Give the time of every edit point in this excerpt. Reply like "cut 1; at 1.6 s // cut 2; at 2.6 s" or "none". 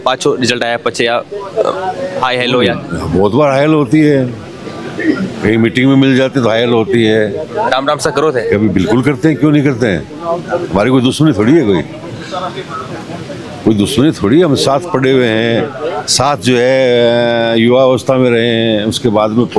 none